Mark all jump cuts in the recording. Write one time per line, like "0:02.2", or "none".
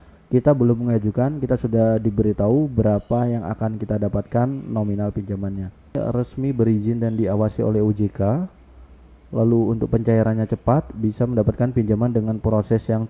0:06.0